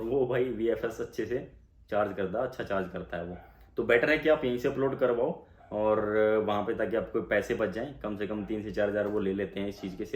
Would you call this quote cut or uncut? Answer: uncut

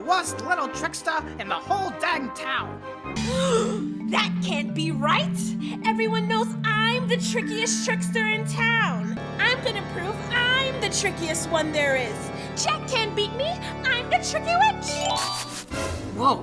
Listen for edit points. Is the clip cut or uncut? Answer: cut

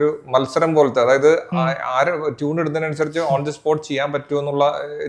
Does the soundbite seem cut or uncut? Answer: uncut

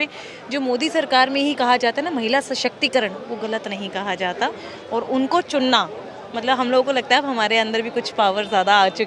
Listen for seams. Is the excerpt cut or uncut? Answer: uncut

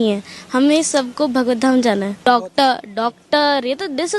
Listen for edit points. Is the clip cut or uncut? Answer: cut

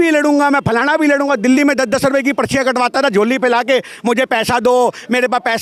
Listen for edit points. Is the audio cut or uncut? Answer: uncut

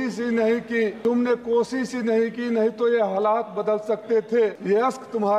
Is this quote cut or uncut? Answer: cut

